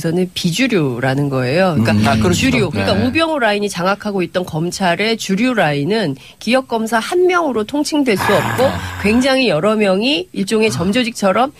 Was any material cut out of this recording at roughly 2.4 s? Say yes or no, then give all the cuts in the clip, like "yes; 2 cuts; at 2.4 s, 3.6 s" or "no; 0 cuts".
no; 1 cut; at 4.1 s